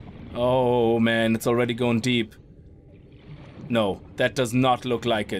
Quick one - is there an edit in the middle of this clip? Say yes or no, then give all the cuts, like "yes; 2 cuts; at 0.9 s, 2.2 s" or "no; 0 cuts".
no; 0 cuts